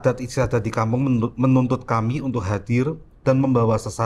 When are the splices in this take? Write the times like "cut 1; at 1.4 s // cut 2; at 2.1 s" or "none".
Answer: none